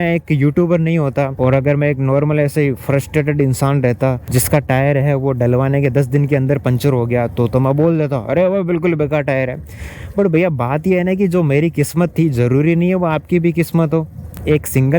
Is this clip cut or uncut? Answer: cut